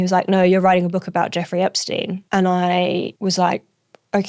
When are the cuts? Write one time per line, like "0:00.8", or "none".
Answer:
0:02.2
0:03.1